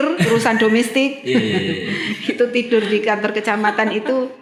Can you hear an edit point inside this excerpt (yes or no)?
no